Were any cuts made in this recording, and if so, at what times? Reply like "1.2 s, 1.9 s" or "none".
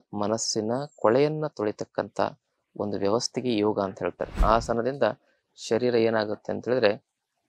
4.4 s